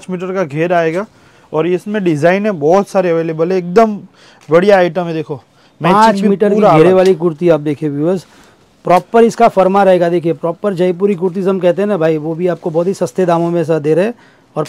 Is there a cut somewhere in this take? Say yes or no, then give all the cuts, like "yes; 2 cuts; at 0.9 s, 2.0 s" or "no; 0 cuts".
no; 0 cuts